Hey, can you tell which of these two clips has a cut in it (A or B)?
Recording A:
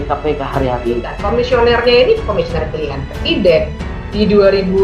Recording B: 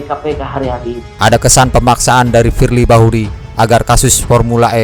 A